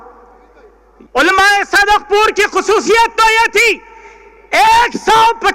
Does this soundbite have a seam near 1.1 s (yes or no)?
yes